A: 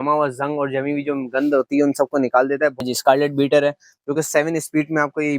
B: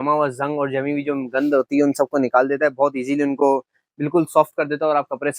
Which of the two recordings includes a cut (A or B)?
A